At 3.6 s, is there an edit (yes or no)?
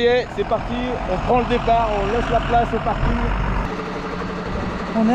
yes